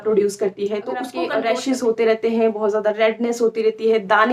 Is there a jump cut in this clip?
yes; 1 cut; at 1.2 s

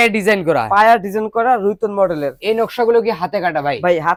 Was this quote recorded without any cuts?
yes; 0 cuts

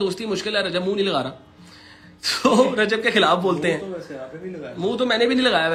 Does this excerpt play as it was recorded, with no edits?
yes; 0 cuts

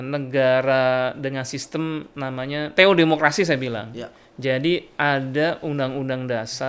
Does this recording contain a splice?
yes; 1 cut; at 2.7 s

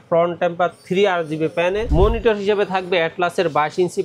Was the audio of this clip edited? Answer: yes; 1 cut; at 1.9 s

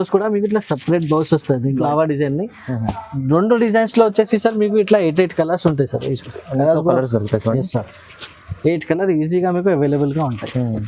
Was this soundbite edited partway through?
yes; 1 cut; at 1.7 s

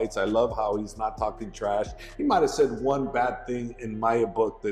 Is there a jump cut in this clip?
no; 0 cuts

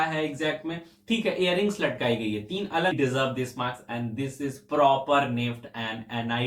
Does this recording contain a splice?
yes; 1 cut; at 2.9 s

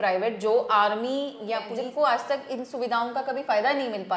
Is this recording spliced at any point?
yes; 1 cut; at 1.7 s

